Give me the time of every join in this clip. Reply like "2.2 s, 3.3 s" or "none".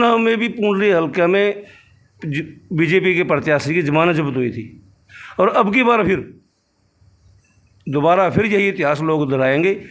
none